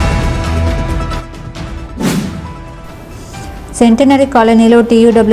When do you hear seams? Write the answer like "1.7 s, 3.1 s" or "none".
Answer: 1.4 s